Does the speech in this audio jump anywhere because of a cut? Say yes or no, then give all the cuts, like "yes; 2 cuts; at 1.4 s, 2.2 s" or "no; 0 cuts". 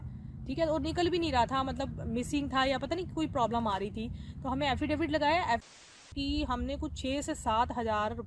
yes; 1 cut; at 5.6 s